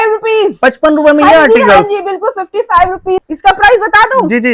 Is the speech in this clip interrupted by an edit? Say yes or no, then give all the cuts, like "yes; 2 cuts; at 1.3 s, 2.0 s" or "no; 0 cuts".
yes; 1 cut; at 3.2 s